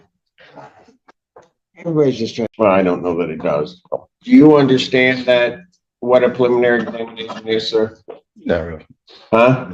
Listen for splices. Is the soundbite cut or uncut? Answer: cut